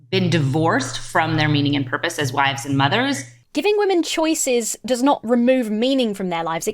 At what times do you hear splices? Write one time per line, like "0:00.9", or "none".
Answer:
0:03.4